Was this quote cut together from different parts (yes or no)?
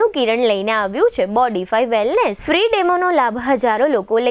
no